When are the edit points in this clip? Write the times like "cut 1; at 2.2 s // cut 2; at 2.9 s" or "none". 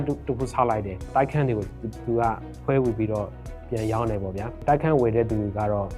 none

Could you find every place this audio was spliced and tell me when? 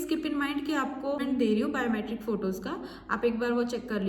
cut 1; at 1.2 s

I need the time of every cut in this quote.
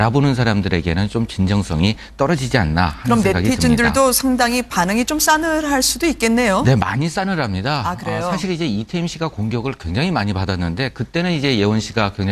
cut 1; at 11.0 s

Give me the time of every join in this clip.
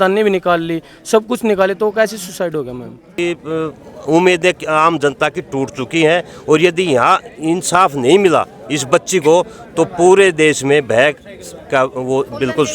cut 1; at 3.1 s

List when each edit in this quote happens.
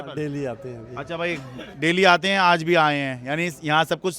none

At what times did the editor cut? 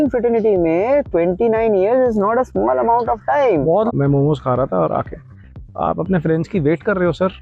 cut 1; at 3.9 s

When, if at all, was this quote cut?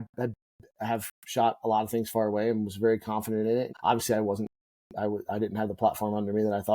cut 1; at 3.7 s

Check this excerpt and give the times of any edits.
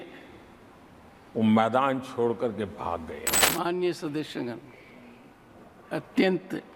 cut 1; at 3.3 s

